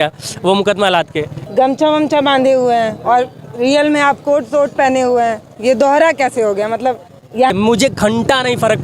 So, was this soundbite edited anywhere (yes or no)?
yes